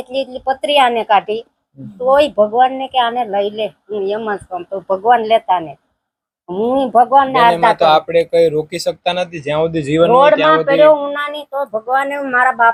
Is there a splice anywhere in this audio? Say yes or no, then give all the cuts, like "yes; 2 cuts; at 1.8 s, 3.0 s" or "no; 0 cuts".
no; 0 cuts